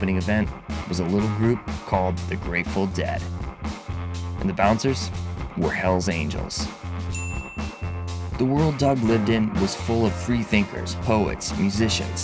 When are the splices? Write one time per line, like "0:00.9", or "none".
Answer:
0:03.7